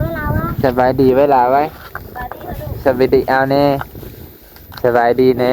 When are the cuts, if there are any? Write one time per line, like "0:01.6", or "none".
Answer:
none